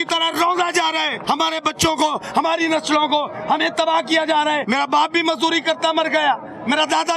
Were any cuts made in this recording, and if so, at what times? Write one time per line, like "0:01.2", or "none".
0:01.2
0:04.6